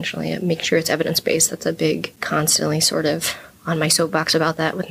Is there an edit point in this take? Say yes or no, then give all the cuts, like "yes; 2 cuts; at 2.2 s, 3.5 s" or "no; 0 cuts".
yes; 1 cut; at 2.1 s